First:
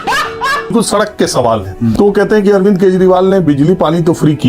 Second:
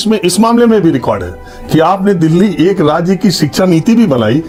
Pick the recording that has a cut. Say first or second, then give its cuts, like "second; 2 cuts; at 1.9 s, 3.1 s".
first; 2 cuts; at 0.7 s, 1.9 s